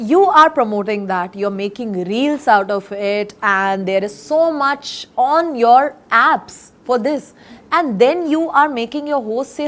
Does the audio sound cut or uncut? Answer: uncut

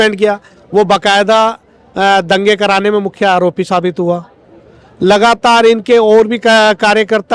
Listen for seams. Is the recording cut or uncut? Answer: uncut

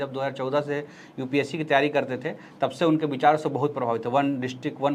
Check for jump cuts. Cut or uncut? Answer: uncut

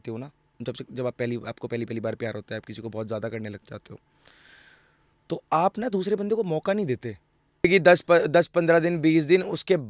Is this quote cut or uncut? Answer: cut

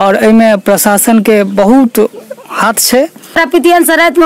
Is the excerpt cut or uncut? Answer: cut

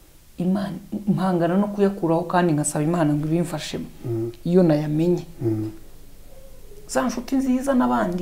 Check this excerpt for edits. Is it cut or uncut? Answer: uncut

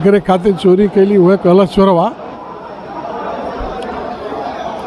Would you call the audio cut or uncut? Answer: uncut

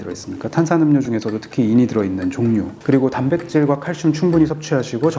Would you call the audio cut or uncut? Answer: cut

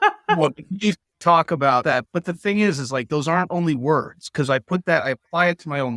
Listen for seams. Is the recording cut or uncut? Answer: cut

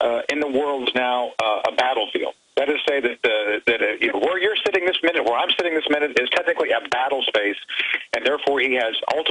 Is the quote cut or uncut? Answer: uncut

